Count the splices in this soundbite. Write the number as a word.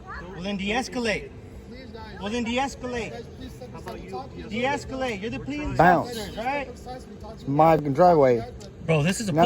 one